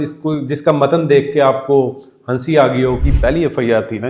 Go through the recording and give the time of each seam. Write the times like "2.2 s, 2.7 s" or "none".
3.0 s

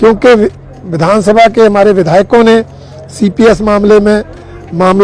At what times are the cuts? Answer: none

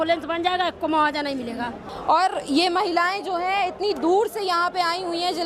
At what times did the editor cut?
1.9 s

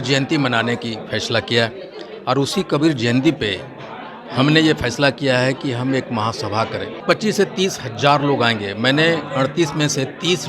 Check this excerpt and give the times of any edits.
7.0 s

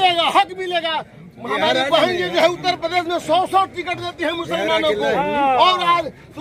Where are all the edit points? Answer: none

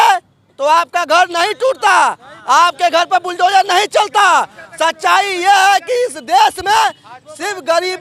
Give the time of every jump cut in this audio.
none

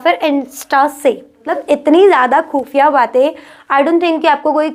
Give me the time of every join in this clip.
1.5 s

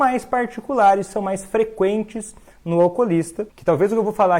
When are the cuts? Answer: 3.4 s

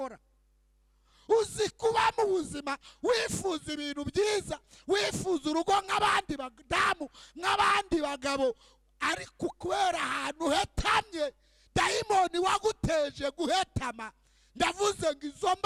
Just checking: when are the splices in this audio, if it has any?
none

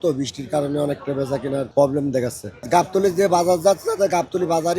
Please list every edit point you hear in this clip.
2.5 s

